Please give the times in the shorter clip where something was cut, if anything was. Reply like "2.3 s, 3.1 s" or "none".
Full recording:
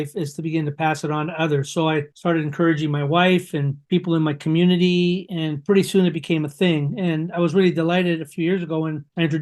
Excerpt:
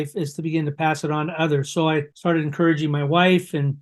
none